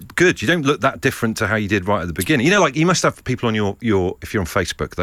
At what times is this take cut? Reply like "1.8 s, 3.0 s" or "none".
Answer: none

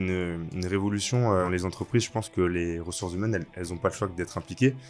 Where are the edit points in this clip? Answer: 1.5 s

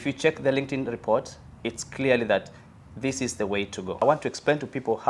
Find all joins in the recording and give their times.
4.0 s

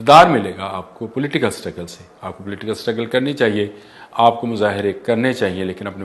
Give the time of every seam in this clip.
none

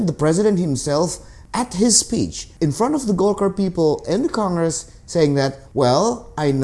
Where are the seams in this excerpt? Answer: 2.4 s, 5.6 s

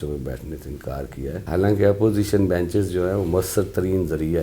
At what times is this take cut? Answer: 1.4 s

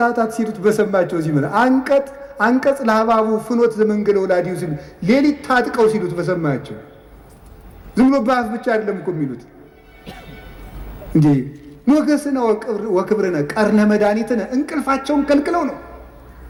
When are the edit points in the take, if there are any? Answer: none

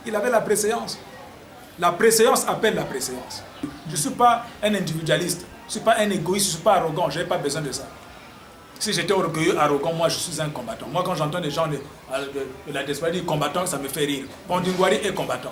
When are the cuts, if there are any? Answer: 3.8 s

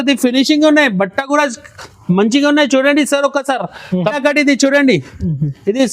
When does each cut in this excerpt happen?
4.2 s

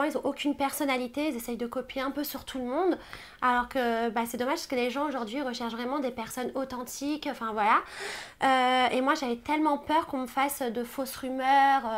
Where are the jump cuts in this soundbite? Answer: none

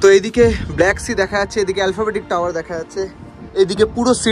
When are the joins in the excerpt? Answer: none

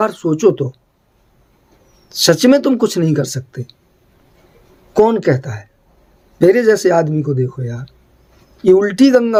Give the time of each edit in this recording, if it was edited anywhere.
none

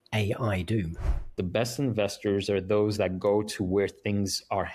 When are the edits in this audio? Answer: 1.3 s

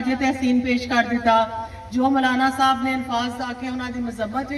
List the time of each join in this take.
none

